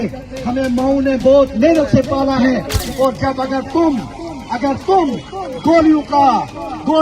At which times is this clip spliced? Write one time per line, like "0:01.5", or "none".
0:02.8